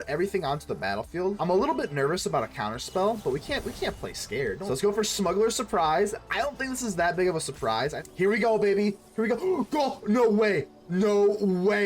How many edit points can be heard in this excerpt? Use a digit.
3